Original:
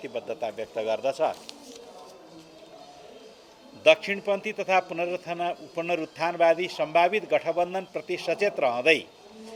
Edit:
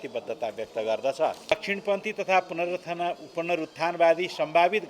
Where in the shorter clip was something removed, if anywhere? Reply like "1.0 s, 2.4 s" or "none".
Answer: 1.5 s